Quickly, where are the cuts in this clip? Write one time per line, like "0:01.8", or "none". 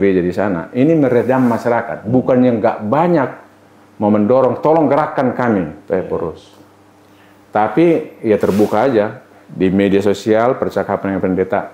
none